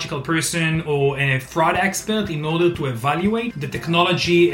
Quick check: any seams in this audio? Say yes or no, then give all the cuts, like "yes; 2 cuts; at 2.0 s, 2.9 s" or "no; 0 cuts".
no; 0 cuts